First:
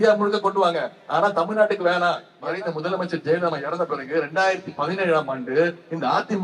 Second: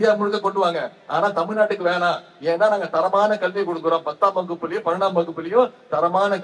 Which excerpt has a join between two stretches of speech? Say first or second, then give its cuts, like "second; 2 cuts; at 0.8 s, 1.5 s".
first; 1 cut; at 2.3 s